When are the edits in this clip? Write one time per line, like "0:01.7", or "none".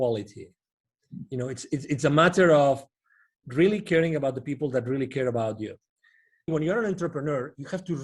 0:06.5